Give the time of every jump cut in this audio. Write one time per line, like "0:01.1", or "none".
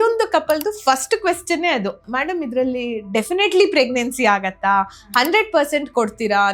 0:02.0

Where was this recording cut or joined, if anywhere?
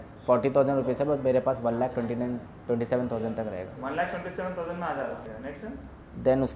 0:05.3

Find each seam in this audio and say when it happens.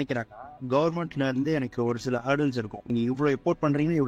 0:02.9

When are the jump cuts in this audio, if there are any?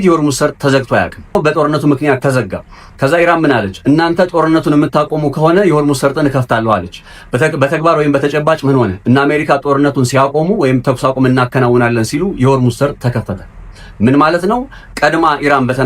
0:01.3

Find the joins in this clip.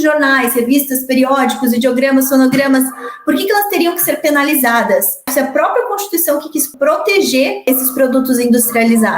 0:05.3
0:06.7
0:07.7

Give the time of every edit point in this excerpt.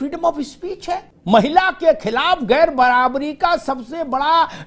0:01.1

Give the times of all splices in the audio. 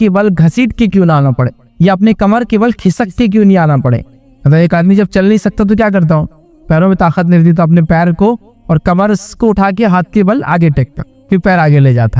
none

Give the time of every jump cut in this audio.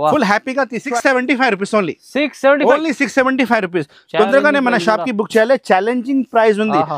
0:01.0

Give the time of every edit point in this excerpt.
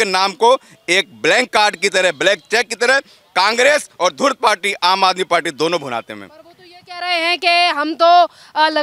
none

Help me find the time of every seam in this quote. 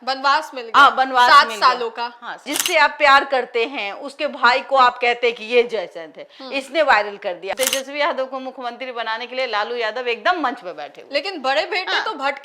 0:02.6
0:07.5

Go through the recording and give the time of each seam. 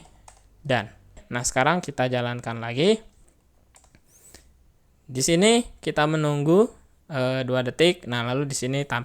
0:01.2

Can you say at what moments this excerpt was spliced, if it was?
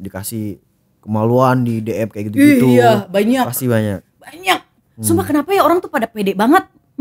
none

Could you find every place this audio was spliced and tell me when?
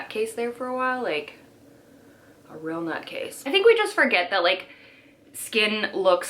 0:03.4

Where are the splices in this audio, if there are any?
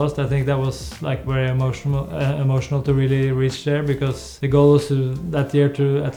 none

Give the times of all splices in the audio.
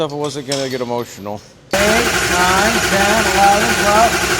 0:01.7

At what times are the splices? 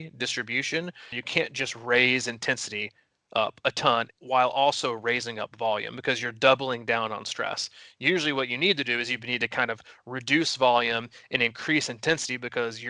0:01.2

